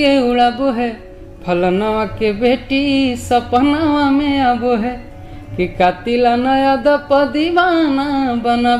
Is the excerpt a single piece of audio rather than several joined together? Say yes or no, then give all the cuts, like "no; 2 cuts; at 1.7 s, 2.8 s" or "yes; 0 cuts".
yes; 0 cuts